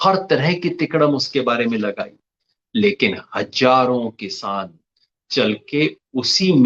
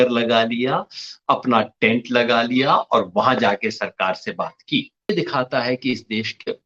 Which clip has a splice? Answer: second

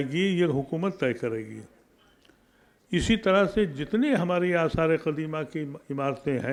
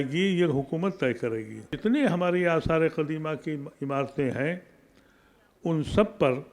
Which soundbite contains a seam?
second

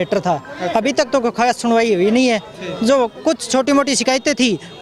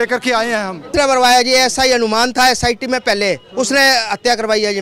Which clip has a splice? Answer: second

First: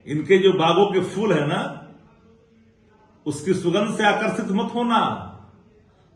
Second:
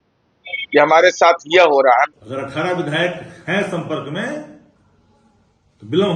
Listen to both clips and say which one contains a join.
second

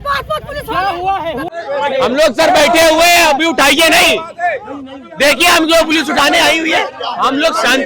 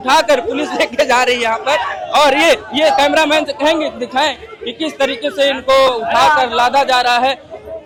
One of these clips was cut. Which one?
first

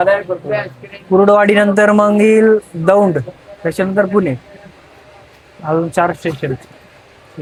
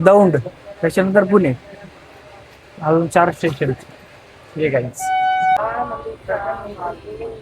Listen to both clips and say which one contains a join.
second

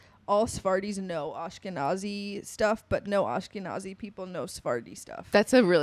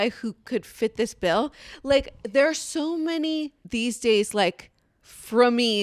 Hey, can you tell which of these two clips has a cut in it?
second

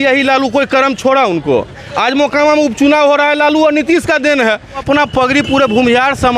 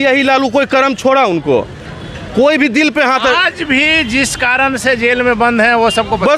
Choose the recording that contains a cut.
first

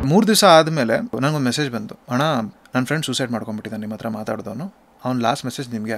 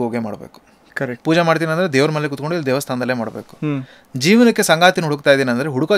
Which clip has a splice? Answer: first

